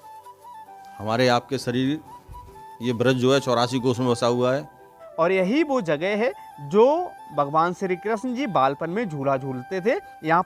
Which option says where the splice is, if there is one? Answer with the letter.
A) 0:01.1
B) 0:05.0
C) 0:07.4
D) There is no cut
B